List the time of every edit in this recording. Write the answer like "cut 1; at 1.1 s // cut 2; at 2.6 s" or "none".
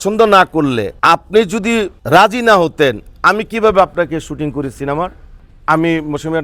cut 1; at 0.9 s // cut 2; at 2.0 s // cut 3; at 5.4 s